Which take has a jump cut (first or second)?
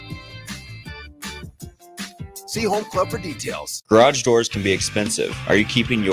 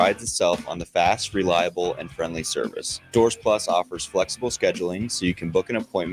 first